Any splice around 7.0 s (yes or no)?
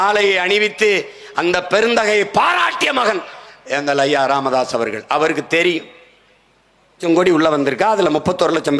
yes